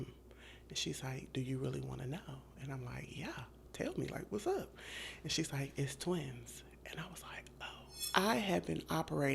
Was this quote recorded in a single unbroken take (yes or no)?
no